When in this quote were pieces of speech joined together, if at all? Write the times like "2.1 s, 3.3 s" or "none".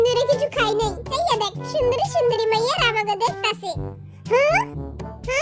1.1 s